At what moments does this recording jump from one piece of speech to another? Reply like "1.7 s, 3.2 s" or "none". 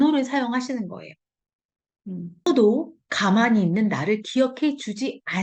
2.5 s